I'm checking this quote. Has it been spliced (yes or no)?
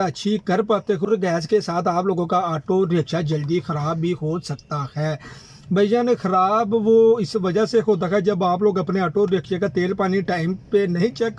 no